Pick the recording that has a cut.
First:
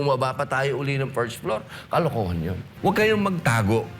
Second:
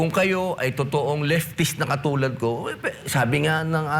first; 1 cut; at 2.6 s

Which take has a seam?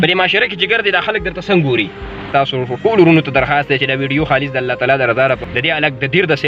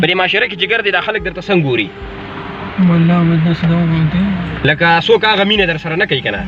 first; 2 cuts; at 2.2 s, 5.4 s

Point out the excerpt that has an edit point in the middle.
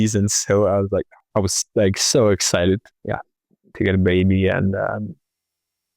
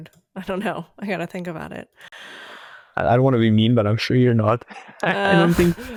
first; 2 cuts; at 1.2 s, 2.9 s

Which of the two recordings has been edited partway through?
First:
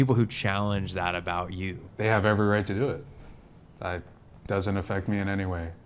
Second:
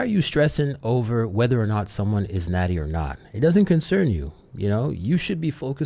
first; 1 cut; at 1.8 s

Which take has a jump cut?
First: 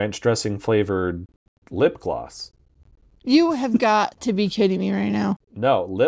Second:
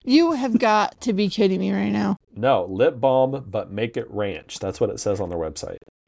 first; 1 cut; at 1.6 s

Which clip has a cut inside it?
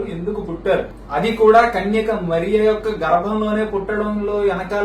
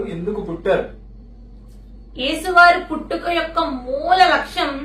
first; 1 cut; at 1.0 s

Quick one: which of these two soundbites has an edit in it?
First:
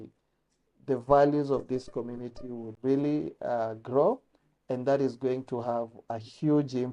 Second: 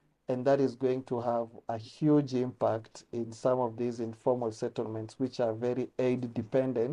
first; 1 cut; at 2.7 s

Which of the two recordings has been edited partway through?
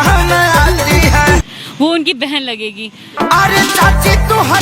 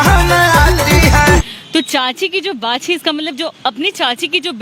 second; 1 cut; at 1.5 s

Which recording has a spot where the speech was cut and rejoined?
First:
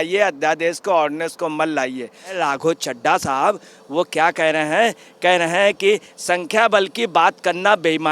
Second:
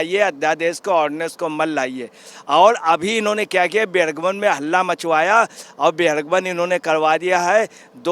first; 1 cut; at 2.4 s

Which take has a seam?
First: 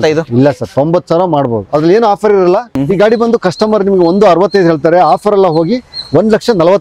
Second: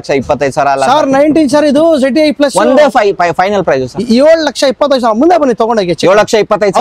first; 1 cut; at 2.7 s

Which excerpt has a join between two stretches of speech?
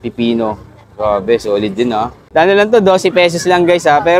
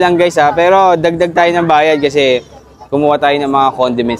first; 1 cut; at 2.2 s

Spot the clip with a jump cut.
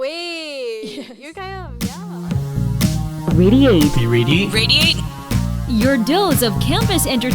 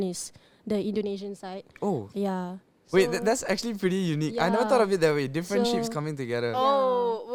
first; 1 cut; at 1.7 s

